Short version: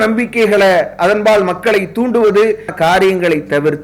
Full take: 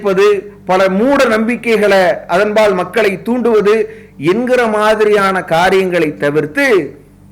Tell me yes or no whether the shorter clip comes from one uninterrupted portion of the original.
no